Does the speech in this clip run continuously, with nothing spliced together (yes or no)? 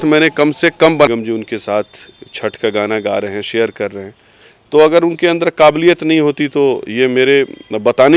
no